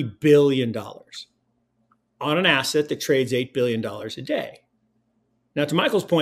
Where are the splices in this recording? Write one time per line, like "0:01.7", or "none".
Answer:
none